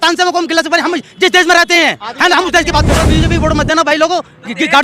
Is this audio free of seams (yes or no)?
no